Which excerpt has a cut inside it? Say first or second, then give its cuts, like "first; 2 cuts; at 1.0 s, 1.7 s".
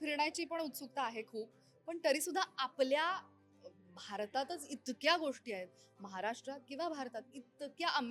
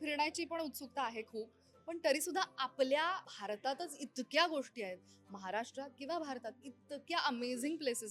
second; 1 cut; at 3.3 s